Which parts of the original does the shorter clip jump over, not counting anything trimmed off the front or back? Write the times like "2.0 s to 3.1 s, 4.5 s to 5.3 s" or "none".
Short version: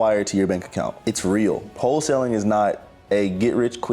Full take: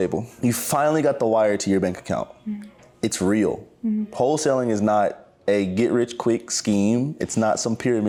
2.3 s to 2.9 s, 3.7 s to 4.1 s